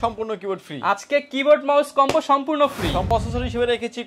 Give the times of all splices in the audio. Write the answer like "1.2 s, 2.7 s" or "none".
3.1 s